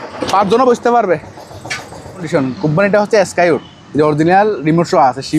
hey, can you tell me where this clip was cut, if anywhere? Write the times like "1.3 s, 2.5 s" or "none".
2.3 s